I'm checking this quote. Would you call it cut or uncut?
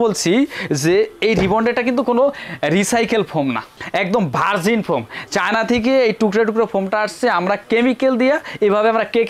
uncut